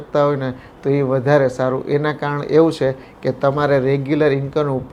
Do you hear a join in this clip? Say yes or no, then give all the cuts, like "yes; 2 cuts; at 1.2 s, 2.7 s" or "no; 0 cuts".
no; 0 cuts